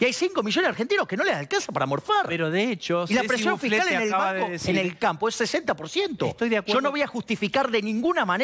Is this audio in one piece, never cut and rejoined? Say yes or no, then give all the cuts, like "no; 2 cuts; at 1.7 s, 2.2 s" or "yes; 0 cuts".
yes; 0 cuts